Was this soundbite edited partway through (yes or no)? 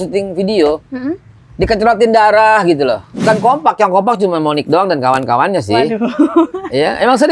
yes